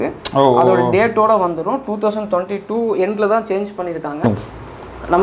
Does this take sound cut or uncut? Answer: cut